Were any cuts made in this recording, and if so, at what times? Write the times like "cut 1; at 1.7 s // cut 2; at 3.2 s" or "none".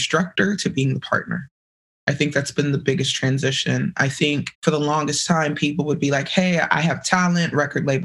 cut 1; at 4.5 s